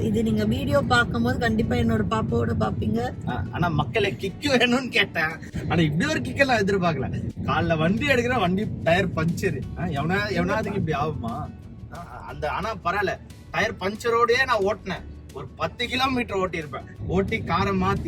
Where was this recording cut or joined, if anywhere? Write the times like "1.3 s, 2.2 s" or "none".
none